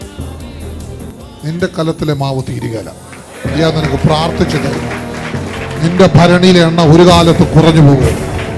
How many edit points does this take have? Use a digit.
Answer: 1